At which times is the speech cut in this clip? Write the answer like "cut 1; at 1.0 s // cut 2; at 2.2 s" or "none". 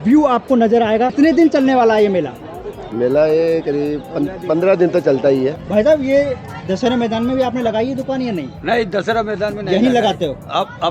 cut 1; at 1.1 s // cut 2; at 5.6 s